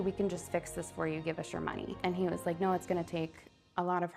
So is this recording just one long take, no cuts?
yes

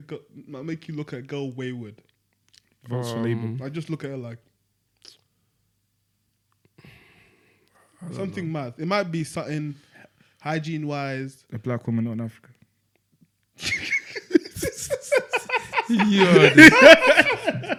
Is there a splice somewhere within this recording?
no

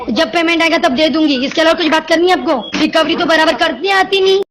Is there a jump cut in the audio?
yes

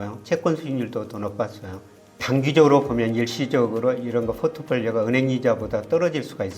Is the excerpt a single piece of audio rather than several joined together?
no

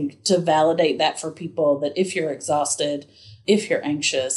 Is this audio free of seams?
yes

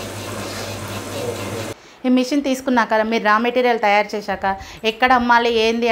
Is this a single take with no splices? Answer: no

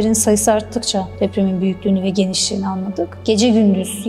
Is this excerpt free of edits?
no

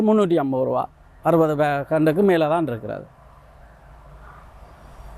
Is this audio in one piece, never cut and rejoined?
yes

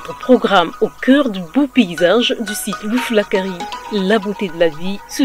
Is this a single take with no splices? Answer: yes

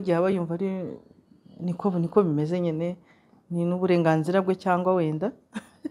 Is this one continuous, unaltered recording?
yes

